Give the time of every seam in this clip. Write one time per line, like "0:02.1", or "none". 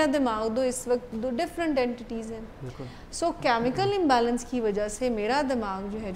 none